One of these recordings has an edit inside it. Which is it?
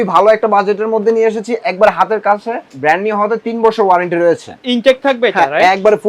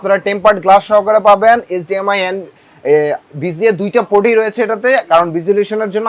first; 1 cut; at 2.7 s

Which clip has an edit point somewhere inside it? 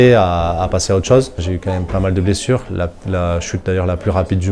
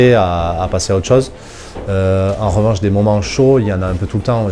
first; 1 cut; at 1.5 s

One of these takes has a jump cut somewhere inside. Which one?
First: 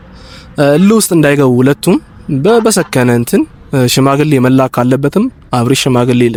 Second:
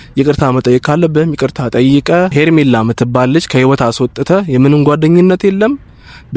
second; 1 cut; at 2.3 s

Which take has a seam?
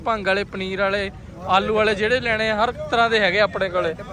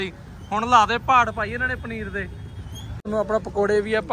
second; 1 cut; at 3.0 s

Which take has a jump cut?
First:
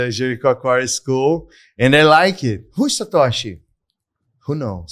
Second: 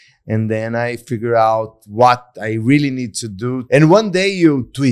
second; 1 cut; at 3.6 s

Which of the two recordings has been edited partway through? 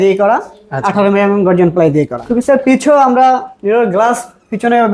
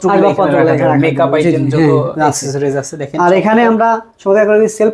first; 1 cut; at 2.2 s

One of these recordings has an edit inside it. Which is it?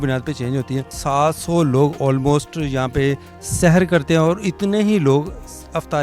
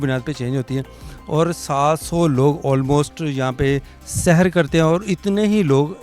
first; 1 cut; at 1.0 s

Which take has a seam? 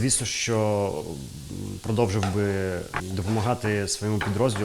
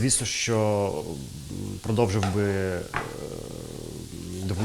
first; 1 cut; at 3.0 s

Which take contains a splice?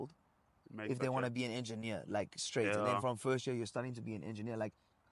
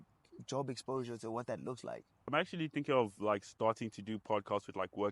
second; 1 cut; at 2.3 s

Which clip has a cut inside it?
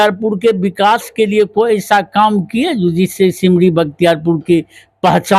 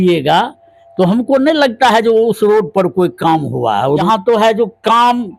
second; 1 cut; at 4.0 s

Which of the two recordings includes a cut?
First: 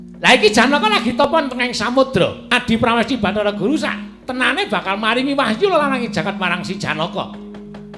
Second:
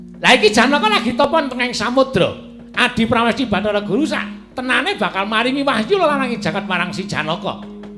first; 1 cut; at 2.5 s

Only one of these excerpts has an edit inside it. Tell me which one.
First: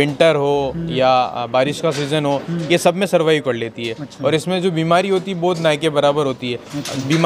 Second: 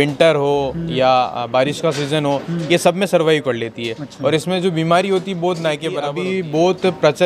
second; 1 cut; at 6.1 s

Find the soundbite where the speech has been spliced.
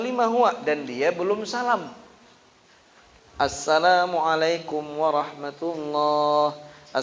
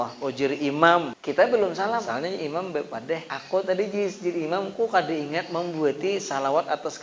second; 3 cuts; at 1.2 s, 2.1 s, 3.3 s

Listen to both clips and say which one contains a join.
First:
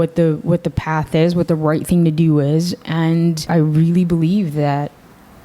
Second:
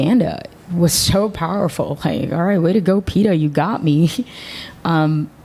first; 1 cut; at 3.5 s

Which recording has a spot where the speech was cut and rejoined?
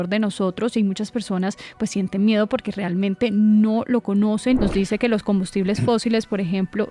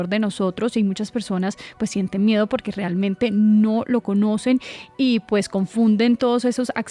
first; 1 cut; at 4.6 s

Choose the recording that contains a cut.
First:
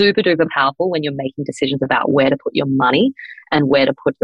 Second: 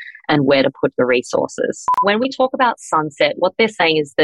second; 1 cut; at 2.0 s

